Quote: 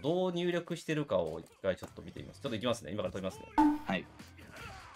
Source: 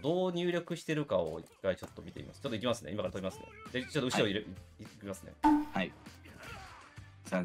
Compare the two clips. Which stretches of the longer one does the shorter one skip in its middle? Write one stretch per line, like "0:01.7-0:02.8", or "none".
0:03.4-0:05.3